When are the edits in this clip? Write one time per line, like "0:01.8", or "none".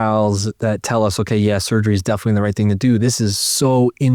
none